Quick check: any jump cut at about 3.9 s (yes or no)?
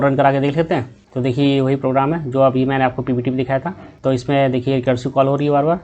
no